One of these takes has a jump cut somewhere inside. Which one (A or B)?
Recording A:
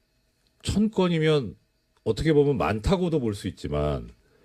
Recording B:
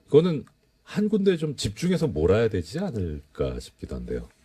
A